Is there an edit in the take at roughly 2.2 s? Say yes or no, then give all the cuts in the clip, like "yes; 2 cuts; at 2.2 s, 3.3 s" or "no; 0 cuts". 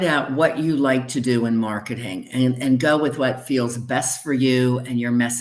no; 0 cuts